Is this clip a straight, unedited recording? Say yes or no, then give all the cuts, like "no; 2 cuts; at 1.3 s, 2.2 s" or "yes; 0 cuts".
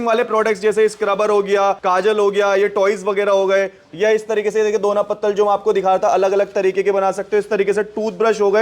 no; 1 cut; at 1.8 s